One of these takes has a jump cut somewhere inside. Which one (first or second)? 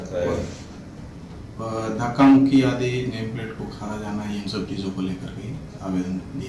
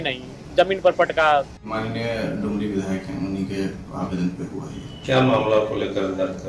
second